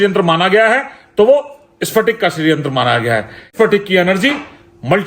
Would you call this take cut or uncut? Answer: cut